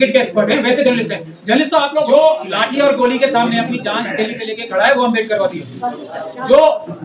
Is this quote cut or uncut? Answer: cut